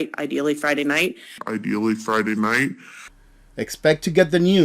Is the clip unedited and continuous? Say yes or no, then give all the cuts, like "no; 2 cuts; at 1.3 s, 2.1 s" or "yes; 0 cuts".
no; 1 cut; at 1.2 s